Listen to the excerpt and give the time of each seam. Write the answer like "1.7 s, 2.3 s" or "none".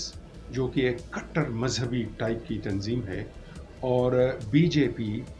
none